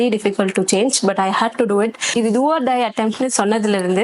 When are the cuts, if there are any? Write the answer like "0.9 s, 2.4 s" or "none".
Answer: 2.1 s